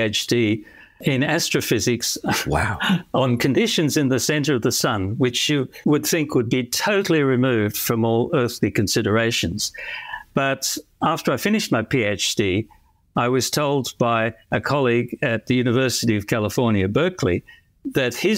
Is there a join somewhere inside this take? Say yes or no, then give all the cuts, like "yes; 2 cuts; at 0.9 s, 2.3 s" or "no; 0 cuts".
no; 0 cuts